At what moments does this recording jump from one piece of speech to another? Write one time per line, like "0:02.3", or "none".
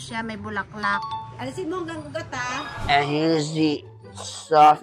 0:01.3
0:02.8